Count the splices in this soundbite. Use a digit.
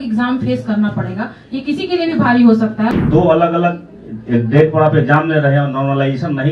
1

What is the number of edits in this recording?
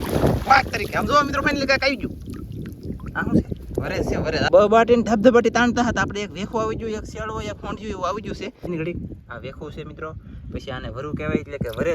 2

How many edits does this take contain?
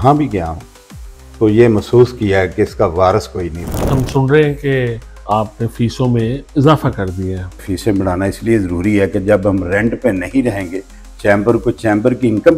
2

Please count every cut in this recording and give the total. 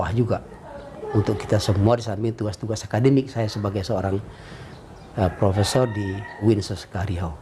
1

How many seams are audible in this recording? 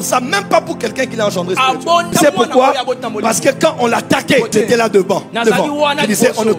2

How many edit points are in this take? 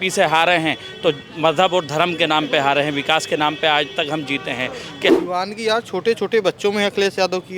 1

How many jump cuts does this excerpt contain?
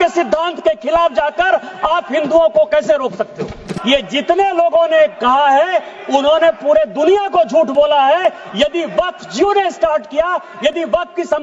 1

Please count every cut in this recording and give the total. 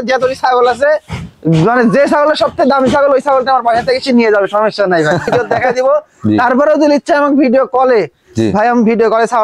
1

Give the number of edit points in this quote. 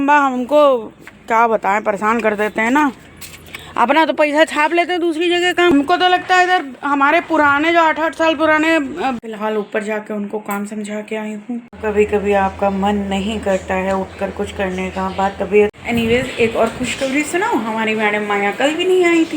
4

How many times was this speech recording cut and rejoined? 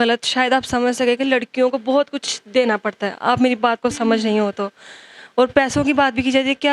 0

